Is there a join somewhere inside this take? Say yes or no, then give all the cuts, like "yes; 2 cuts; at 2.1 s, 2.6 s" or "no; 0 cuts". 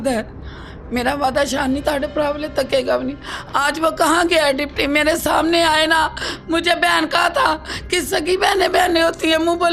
no; 0 cuts